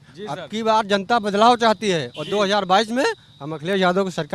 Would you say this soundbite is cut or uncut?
uncut